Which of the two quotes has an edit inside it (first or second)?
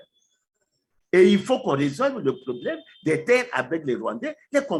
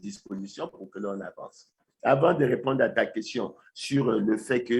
second